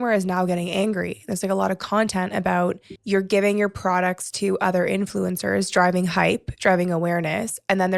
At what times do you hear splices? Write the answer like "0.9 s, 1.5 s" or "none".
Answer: 2.9 s